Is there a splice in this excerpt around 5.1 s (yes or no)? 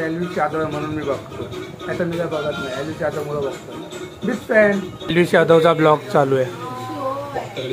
yes